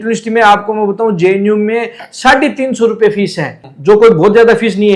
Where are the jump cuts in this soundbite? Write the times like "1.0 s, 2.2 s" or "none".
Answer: none

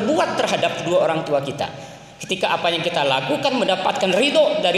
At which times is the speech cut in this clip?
none

